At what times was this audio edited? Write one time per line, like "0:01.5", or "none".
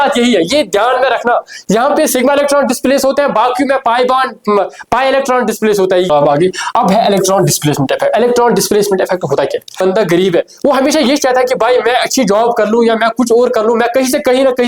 0:06.1
0:09.8